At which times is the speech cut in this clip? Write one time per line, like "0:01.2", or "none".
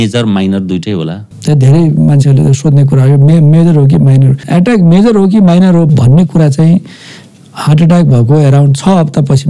0:01.2
0:04.4